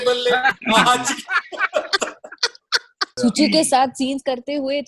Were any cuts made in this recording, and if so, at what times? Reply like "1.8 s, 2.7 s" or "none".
3.1 s